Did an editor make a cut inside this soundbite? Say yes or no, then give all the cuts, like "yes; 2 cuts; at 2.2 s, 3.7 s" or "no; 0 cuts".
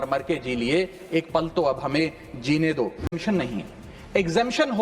yes; 1 cut; at 3.2 s